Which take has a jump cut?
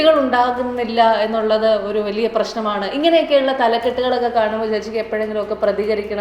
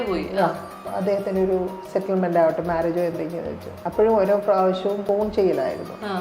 second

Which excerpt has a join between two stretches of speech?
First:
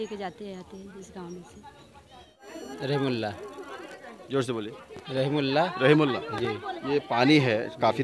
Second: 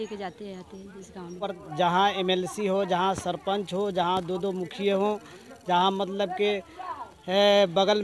second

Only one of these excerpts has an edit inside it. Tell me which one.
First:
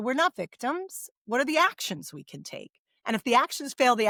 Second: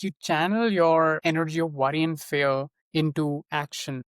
second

